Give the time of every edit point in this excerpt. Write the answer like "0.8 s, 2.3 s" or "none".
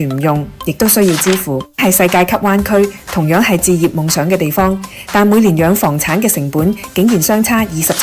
1.8 s